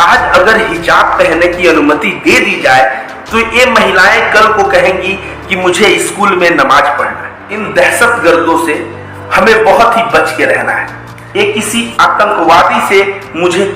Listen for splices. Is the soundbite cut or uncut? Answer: cut